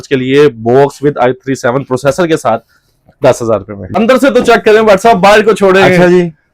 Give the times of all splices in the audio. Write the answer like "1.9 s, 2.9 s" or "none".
3.9 s

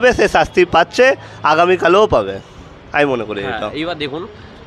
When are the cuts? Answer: none

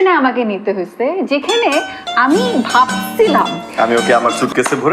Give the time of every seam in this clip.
3.7 s

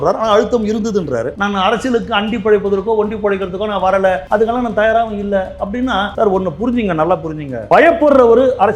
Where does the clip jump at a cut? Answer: 1.3 s, 4.2 s, 6.1 s, 7.5 s

